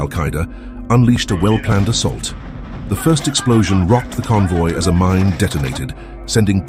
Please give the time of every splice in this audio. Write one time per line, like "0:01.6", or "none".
none